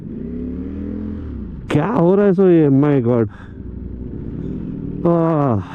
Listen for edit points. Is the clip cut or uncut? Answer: uncut